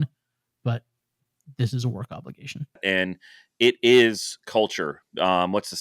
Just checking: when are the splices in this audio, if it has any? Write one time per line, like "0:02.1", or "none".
0:02.8